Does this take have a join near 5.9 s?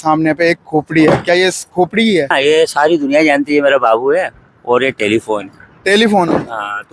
no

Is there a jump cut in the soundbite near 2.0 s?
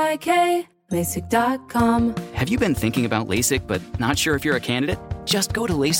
yes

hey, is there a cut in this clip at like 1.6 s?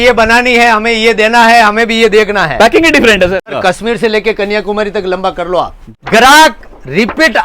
no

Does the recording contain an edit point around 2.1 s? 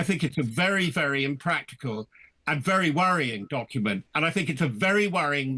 no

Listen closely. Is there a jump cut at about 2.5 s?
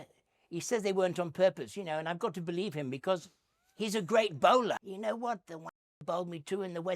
no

